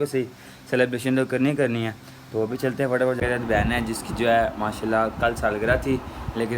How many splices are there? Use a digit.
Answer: 1